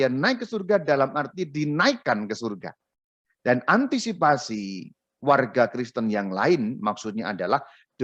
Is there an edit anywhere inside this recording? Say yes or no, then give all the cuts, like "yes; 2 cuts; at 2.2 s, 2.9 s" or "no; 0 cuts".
no; 0 cuts